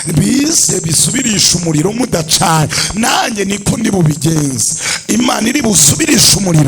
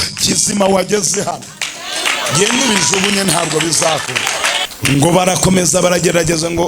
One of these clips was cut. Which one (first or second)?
second